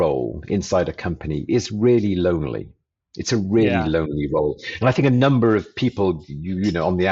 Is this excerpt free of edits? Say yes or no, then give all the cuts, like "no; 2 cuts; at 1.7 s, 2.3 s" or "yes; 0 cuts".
yes; 0 cuts